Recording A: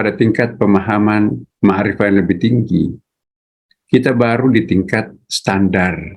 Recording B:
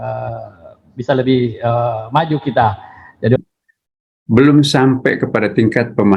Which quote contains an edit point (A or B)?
B